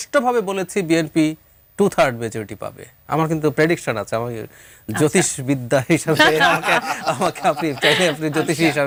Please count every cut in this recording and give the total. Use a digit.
0